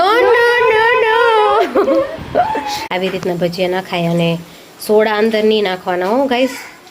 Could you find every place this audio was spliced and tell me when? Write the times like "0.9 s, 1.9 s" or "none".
2.8 s